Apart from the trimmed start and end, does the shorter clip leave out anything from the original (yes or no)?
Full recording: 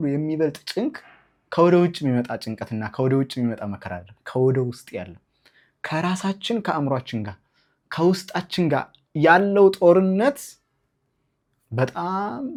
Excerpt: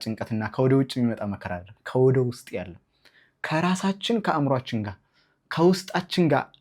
no